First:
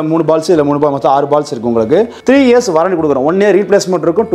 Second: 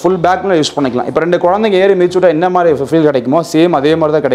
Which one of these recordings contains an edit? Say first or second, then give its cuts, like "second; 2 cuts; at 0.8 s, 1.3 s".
first; 1 cut; at 2.1 s